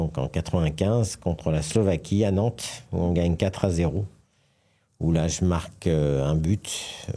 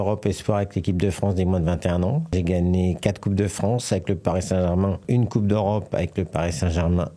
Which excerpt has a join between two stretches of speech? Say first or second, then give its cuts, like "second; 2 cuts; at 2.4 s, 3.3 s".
second; 2 cuts; at 2.3 s, 5.0 s